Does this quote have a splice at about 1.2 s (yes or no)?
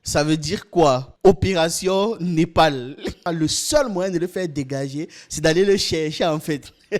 no